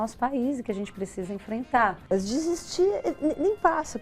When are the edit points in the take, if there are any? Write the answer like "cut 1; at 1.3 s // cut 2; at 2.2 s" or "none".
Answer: cut 1; at 2.0 s